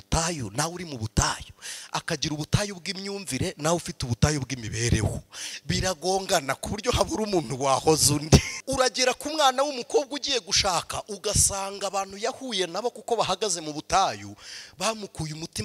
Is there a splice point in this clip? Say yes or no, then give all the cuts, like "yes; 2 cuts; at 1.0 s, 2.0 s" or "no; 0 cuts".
yes; 1 cut; at 8.5 s